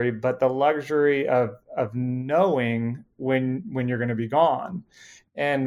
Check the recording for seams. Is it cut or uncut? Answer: uncut